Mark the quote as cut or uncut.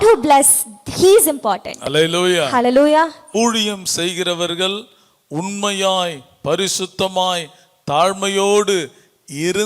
cut